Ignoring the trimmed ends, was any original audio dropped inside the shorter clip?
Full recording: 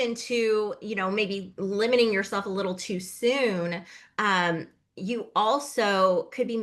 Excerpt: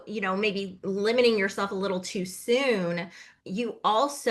yes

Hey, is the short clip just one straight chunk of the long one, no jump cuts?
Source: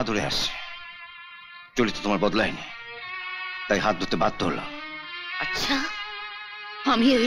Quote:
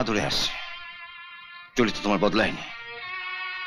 yes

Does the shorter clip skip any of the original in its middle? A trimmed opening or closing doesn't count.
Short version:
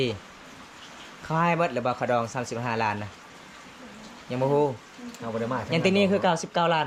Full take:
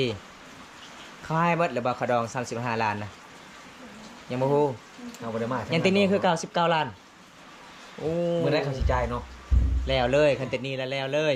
no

